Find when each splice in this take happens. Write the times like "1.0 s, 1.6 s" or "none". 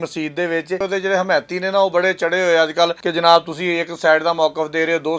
0.8 s, 3.0 s